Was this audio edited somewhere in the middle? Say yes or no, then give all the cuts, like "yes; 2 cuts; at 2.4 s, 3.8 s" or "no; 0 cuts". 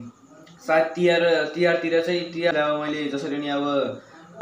yes; 1 cut; at 2.5 s